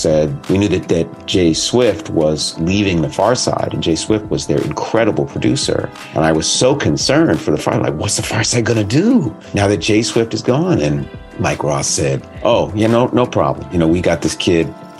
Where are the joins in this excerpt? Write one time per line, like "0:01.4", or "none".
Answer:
0:06.0
0:09.4
0:11.2
0:12.3
0:13.7